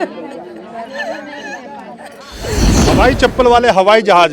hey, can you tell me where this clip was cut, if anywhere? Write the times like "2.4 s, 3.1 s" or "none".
2.8 s